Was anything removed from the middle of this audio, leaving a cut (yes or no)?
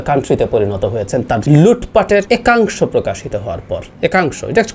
yes